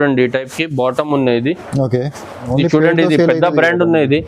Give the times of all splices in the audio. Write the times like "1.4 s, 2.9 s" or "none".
2.4 s